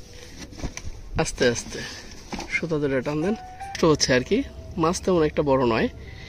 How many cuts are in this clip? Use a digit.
1